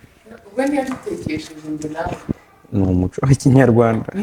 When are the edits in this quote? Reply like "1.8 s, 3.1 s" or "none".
none

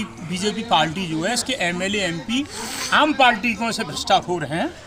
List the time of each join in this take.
none

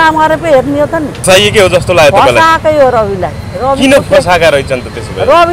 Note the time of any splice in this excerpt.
1.2 s

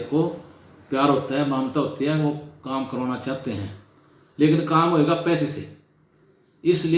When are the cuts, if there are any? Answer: none

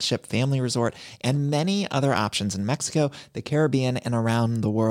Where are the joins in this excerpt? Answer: none

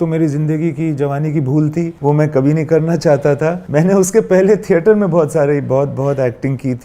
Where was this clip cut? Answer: 1.9 s, 3.6 s

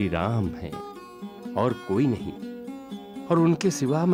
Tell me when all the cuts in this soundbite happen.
none

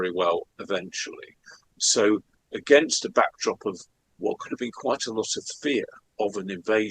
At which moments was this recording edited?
6.0 s

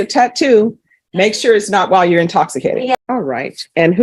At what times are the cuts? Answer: 3.0 s

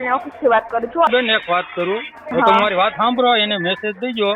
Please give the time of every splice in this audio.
1.1 s, 2.2 s

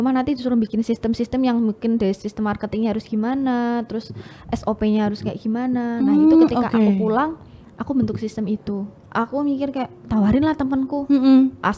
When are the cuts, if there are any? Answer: 9.0 s

